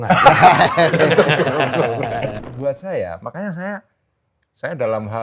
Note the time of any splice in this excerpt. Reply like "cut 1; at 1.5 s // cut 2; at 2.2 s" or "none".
cut 1; at 2.4 s